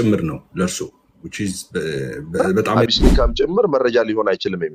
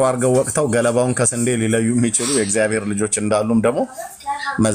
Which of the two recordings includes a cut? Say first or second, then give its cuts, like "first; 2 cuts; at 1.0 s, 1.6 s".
first; 1 cut; at 2.9 s